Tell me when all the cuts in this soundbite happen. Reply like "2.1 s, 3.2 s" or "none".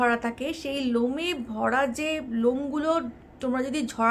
none